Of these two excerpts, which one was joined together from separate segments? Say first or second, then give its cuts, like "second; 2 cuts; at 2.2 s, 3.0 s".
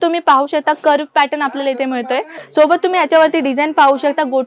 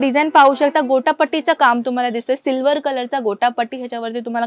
first; 1 cut; at 2.4 s